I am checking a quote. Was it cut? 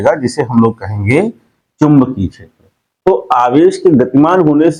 no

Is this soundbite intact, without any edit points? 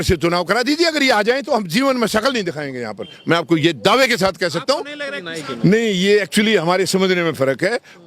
no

